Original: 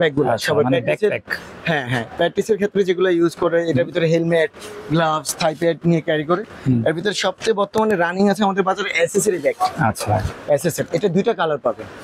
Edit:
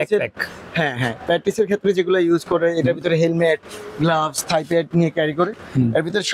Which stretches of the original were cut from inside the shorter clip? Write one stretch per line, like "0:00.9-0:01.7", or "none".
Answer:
none